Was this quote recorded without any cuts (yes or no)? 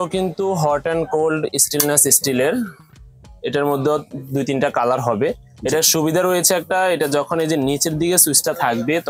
yes